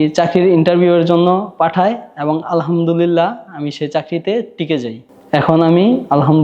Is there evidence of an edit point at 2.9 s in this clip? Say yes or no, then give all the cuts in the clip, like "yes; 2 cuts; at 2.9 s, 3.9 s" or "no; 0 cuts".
no; 1 cut; at 5.0 s